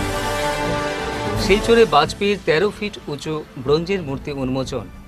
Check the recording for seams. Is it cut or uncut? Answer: uncut